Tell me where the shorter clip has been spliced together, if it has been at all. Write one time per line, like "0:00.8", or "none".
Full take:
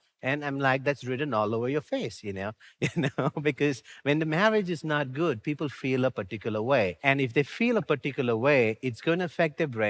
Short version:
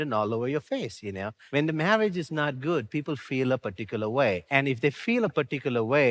0:01.4